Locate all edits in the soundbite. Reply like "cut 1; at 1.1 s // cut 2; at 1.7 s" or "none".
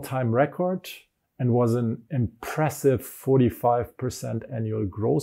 none